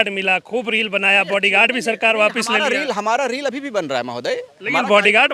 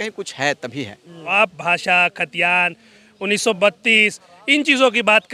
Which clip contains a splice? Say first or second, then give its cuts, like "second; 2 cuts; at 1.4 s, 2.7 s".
second; 1 cut; at 1.2 s